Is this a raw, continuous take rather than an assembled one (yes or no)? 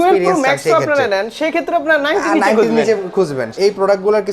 no